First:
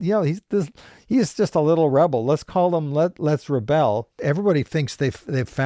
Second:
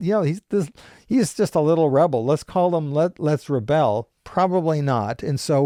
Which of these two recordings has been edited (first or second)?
first